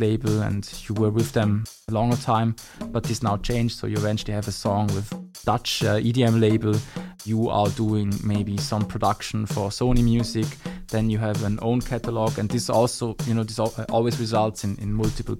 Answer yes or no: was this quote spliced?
yes